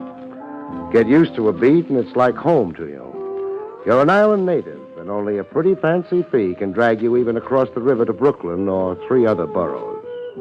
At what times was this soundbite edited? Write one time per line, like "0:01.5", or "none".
0:09.2